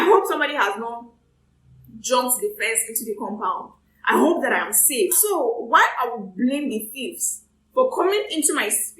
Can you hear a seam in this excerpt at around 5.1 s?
yes; 1 cut; at 5.1 s

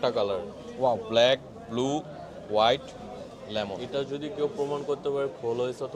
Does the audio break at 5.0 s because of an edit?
no; 1 cut; at 3.8 s

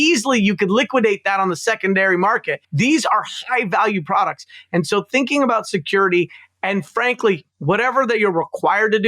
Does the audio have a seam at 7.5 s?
yes; 2 cuts; at 2.6 s, 7.5 s

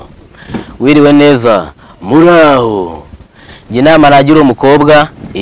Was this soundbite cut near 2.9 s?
no; 0 cuts

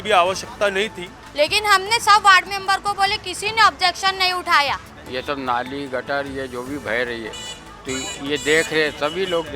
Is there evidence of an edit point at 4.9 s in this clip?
yes; 2 cuts; at 1.2 s, 4.9 s

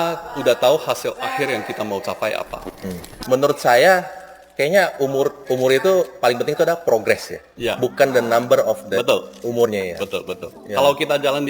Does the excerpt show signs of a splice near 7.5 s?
no; 1 cut; at 3.1 s

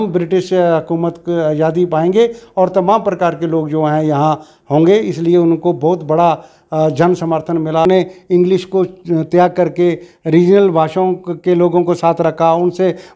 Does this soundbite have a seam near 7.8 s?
yes; 1 cut; at 7.8 s

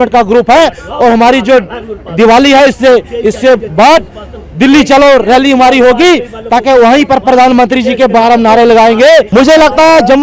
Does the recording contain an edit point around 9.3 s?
yes; 1 cut; at 9.3 s

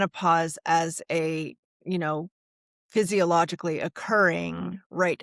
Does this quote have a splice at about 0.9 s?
no; 0 cuts

